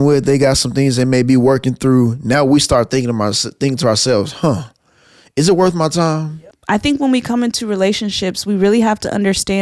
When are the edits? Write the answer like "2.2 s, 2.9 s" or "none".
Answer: 6.3 s